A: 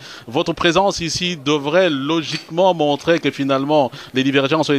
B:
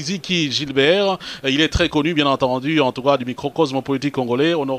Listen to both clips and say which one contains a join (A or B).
B